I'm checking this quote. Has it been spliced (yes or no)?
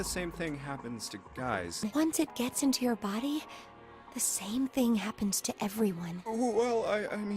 yes